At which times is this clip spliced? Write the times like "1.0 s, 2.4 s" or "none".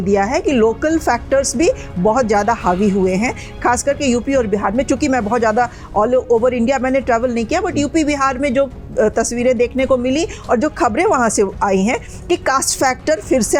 none